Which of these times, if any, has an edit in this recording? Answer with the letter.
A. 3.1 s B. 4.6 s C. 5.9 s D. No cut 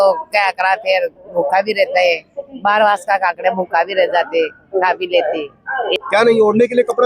C